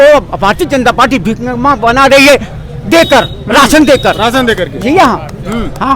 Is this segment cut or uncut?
uncut